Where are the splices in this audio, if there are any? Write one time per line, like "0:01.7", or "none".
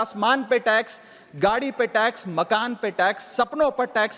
none